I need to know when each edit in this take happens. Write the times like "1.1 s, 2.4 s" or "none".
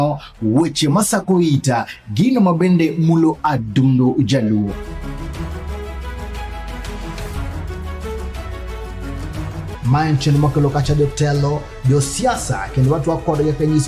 none